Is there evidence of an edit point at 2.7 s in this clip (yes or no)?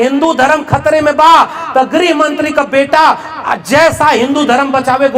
no